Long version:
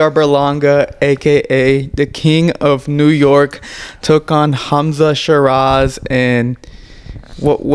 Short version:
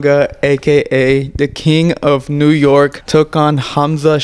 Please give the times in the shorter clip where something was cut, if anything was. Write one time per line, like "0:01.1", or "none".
0:03.0